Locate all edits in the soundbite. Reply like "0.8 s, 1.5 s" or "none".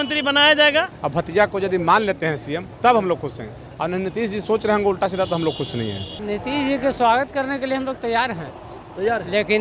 1.0 s, 6.1 s